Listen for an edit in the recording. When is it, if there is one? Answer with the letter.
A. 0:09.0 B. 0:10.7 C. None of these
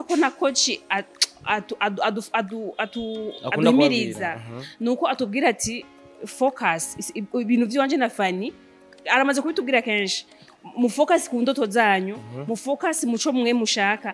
C